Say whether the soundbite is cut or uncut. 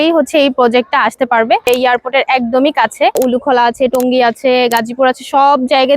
cut